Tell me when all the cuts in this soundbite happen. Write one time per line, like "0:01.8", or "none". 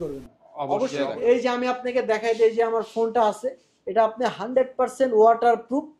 0:01.0